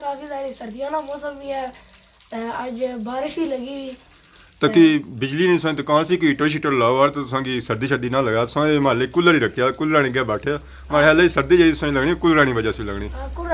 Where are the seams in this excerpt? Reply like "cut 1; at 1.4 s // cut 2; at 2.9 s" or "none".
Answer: none